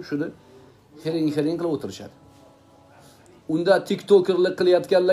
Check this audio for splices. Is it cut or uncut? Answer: uncut